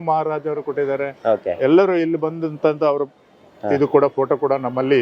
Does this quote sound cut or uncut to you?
uncut